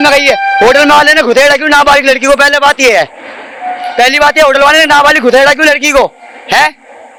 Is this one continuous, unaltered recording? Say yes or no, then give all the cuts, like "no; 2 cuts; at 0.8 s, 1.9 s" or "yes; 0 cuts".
yes; 0 cuts